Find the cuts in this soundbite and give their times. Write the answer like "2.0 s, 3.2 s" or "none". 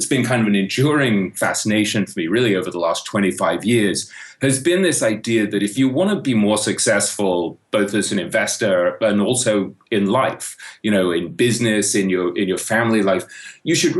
5.7 s